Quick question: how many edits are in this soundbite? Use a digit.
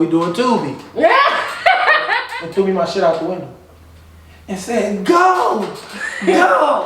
1